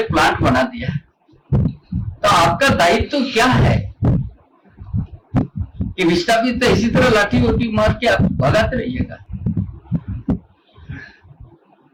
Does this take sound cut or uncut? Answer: uncut